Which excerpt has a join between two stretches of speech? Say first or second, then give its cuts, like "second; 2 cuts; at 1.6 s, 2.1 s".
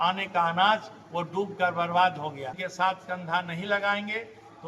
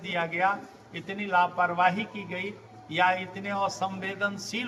first; 1 cut; at 2.6 s